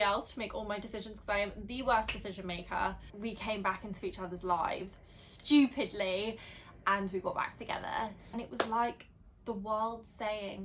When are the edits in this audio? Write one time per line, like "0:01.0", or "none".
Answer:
0:03.1
0:08.3